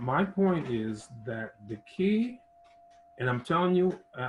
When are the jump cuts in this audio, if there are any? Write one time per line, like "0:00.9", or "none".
none